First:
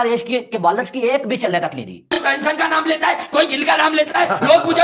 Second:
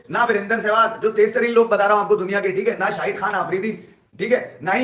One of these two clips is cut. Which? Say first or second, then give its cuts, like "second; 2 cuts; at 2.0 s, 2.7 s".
first; 1 cut; at 2.1 s